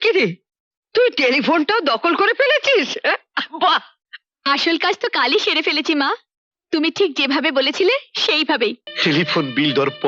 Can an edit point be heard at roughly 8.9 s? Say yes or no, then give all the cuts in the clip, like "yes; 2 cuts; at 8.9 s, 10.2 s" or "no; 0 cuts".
yes; 1 cut; at 8.9 s